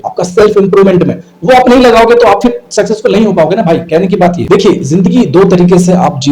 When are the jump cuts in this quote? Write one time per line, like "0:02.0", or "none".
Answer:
0:04.4